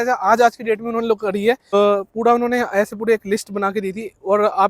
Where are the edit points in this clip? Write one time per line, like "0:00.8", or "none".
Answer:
0:01.7